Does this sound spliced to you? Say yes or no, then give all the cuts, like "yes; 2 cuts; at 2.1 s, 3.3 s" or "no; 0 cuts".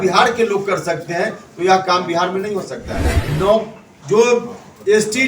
yes; 1 cut; at 3.1 s